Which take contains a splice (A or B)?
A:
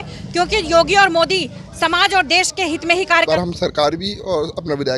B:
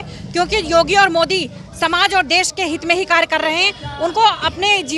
A